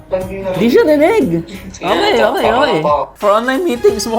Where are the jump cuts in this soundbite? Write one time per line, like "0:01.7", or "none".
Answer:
0:03.1